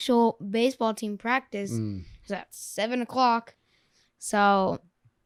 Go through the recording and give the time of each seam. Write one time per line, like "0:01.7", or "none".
none